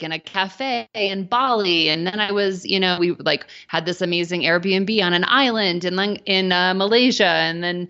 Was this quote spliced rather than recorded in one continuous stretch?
no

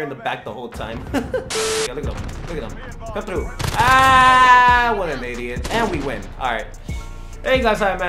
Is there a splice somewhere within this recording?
yes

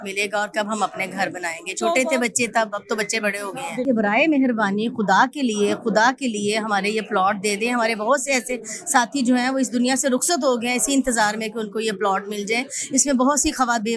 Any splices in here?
no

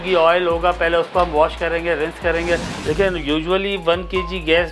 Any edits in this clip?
yes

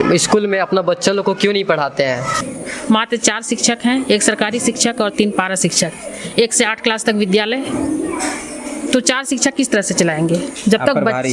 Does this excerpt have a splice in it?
yes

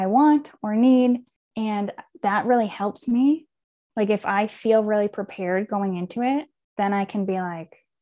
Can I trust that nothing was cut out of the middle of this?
no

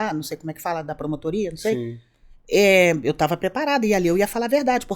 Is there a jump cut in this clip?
no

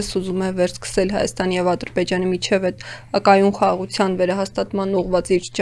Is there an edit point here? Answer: no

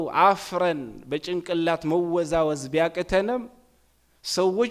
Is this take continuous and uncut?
yes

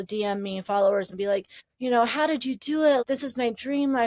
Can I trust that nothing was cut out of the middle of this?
no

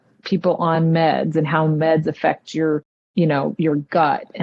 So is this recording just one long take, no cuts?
yes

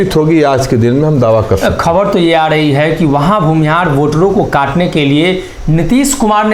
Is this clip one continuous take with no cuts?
yes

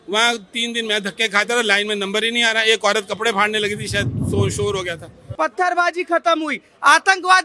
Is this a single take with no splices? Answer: no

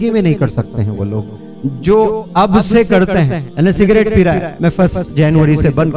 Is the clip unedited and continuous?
no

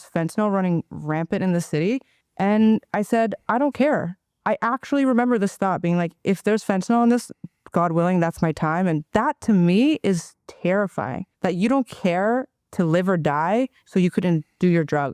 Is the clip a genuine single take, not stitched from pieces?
no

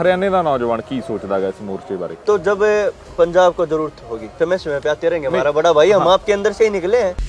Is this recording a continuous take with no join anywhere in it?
no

